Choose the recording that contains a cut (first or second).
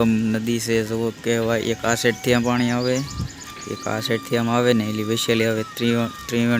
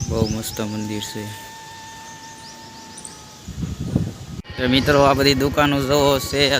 second